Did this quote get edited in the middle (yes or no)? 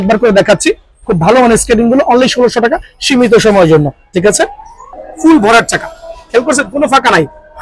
yes